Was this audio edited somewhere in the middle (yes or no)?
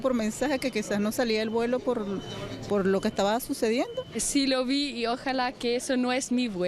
yes